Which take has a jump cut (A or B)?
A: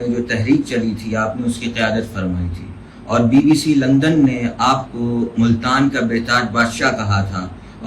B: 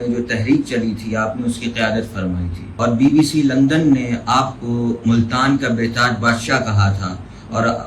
B